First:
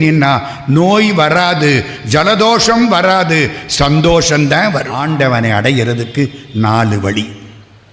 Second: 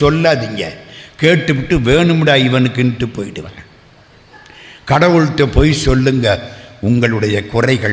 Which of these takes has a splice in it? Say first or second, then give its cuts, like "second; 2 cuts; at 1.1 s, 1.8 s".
first; 1 cut; at 5.0 s